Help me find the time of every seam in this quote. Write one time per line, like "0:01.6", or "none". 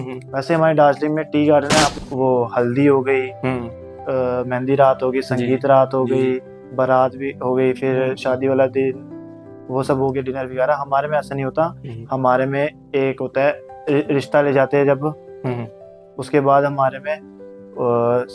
0:02.0